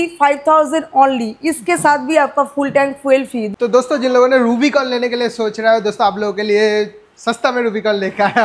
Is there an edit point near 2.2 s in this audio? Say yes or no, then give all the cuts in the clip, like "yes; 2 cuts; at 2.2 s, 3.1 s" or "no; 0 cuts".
no; 1 cut; at 3.5 s